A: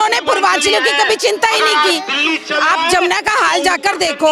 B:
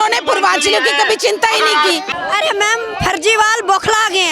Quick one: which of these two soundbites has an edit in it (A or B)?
B